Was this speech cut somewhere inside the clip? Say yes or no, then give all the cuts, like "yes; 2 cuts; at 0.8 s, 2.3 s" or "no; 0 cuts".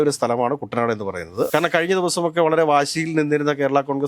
yes; 1 cut; at 1.5 s